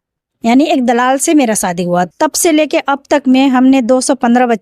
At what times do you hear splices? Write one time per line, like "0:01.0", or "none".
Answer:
0:02.1